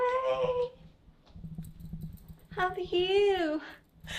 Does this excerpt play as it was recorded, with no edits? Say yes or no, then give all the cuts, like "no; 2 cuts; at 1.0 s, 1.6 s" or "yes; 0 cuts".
yes; 0 cuts